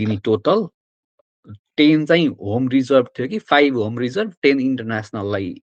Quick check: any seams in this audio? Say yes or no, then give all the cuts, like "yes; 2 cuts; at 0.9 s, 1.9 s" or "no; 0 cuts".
no; 0 cuts